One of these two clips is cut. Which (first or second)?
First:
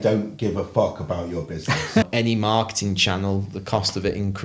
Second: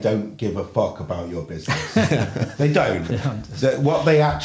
first